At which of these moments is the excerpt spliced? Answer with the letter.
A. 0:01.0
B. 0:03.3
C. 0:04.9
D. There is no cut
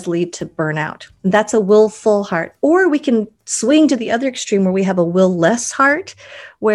A